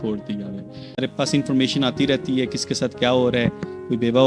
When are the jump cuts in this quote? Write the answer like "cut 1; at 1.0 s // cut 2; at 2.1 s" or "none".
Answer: cut 1; at 1.0 s